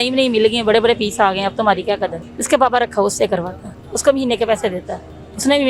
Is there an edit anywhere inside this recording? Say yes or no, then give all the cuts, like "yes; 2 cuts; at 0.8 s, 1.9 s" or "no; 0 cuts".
yes; 1 cut; at 2.3 s